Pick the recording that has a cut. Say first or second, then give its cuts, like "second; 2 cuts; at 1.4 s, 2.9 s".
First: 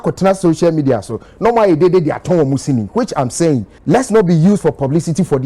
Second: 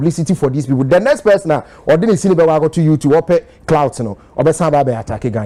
first; 1 cut; at 3.7 s